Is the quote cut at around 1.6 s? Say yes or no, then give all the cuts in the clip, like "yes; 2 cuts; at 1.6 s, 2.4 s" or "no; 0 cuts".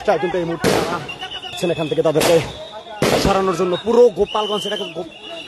yes; 1 cut; at 1.6 s